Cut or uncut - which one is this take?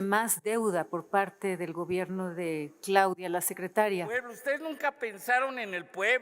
cut